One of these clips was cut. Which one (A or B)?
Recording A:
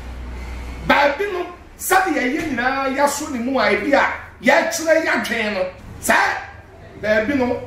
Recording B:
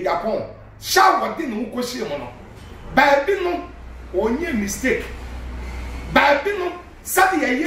A